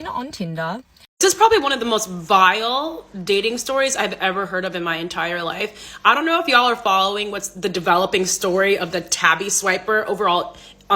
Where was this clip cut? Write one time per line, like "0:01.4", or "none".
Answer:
0:01.0